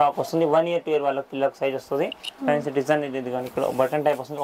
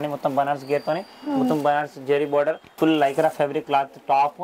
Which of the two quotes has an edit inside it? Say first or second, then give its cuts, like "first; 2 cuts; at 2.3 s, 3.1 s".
second; 1 cut; at 2.7 s